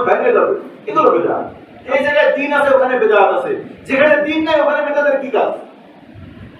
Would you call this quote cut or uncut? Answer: cut